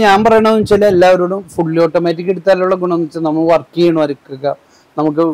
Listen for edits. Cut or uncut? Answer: uncut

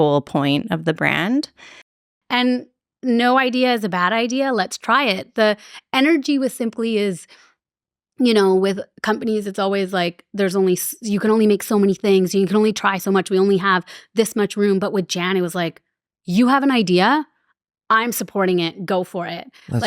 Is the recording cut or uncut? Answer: cut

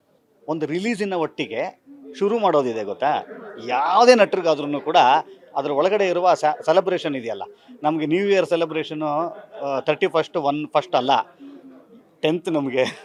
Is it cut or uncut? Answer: uncut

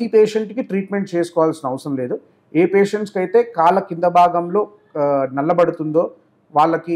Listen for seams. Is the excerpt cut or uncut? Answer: uncut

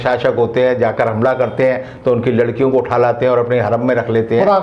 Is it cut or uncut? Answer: uncut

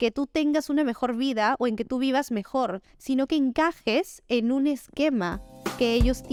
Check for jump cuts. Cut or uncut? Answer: uncut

